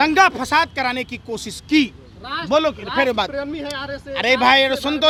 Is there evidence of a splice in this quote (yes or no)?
no